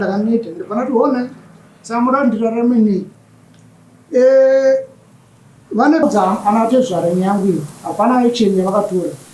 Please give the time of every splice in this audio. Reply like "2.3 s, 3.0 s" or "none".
6.0 s